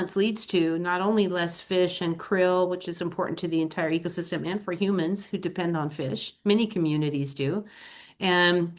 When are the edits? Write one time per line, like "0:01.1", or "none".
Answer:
none